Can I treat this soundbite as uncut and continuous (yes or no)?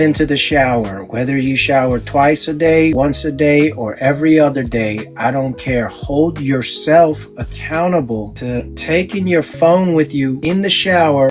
yes